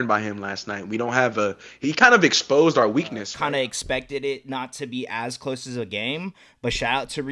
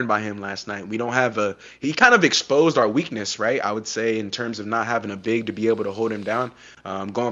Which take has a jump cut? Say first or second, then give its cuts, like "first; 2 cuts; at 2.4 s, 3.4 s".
first; 1 cut; at 3.2 s